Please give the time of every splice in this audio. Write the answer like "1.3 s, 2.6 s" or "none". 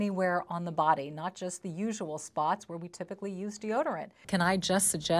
4.1 s